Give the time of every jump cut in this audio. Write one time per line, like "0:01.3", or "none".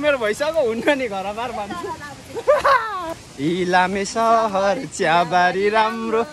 0:03.2